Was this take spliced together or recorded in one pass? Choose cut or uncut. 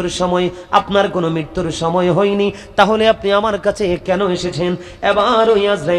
cut